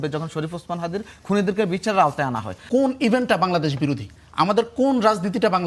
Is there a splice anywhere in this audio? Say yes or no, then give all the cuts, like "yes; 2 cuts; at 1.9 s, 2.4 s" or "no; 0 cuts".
yes; 1 cut; at 2.5 s